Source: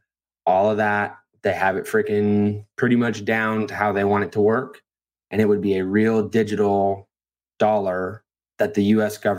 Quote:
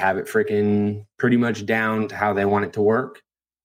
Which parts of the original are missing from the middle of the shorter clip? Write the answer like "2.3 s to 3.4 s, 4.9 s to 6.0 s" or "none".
none